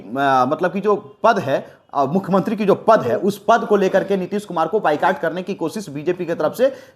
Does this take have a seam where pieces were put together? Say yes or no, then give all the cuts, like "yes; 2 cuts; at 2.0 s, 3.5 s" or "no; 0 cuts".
no; 0 cuts